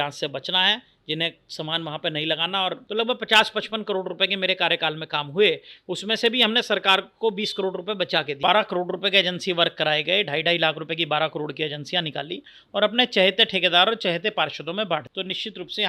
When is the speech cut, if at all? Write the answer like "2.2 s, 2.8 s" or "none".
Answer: 2.8 s, 8.4 s, 15.1 s